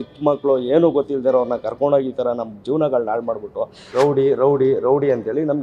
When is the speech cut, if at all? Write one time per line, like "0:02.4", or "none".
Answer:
0:03.9